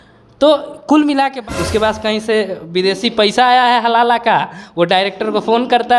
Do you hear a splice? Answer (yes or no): yes